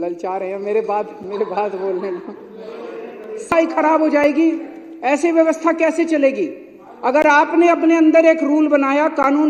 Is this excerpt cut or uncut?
cut